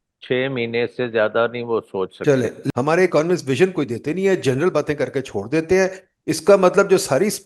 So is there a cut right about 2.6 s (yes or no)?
yes